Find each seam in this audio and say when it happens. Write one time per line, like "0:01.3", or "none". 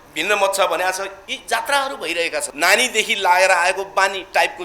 0:02.5